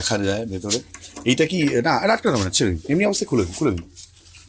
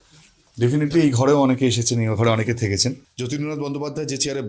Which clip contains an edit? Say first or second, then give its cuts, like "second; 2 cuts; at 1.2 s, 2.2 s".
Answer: second; 1 cut; at 3.1 s